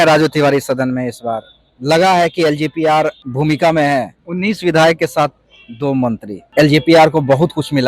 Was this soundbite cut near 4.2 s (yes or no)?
yes